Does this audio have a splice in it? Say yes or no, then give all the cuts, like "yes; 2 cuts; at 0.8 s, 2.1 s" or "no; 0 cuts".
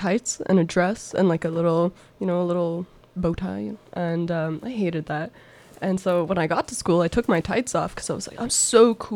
no; 0 cuts